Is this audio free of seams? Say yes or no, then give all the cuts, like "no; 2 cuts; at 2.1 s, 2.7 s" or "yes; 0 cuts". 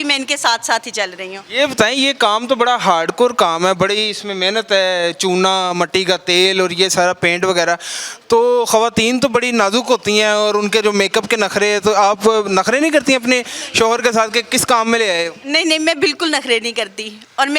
yes; 0 cuts